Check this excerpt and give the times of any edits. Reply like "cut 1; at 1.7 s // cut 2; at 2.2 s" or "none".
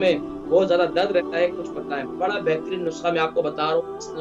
cut 1; at 2.1 s